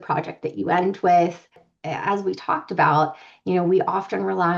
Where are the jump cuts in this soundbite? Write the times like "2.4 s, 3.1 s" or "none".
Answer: 1.5 s

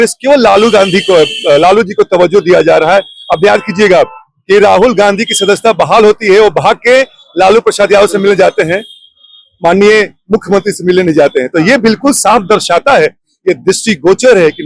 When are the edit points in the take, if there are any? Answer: none

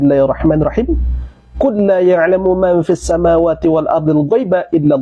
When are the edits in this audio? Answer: none

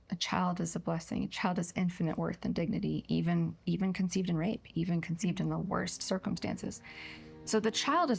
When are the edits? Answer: none

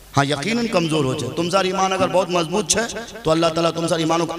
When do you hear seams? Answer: none

